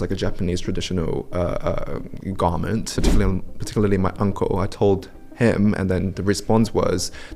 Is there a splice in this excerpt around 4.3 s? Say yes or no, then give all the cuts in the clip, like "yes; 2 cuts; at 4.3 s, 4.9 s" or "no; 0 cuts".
no; 1 cut; at 3.0 s